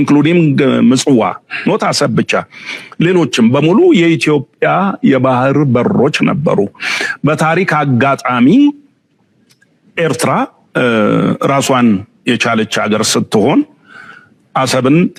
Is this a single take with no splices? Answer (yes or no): yes